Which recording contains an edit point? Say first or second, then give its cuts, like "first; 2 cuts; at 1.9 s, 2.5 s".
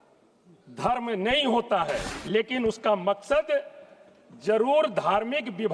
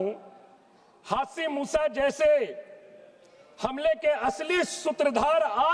first; 1 cut; at 2.1 s